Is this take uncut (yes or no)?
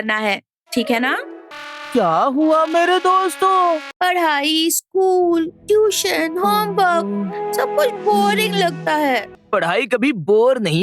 no